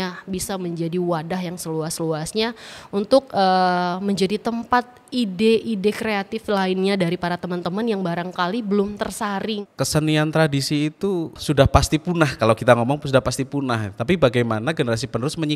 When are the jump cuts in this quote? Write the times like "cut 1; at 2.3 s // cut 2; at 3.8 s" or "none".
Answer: cut 1; at 9.6 s // cut 2; at 11.3 s